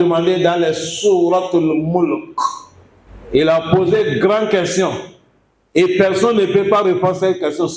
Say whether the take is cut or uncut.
uncut